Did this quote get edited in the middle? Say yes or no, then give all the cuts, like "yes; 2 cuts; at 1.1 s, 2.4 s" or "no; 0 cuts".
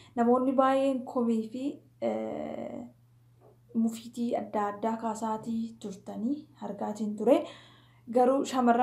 no; 0 cuts